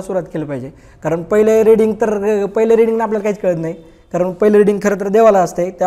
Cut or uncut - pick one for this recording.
uncut